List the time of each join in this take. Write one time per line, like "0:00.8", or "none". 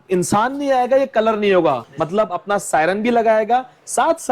0:01.9